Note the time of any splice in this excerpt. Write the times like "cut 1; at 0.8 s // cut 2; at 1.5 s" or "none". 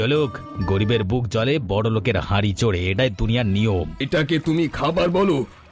cut 1; at 3.9 s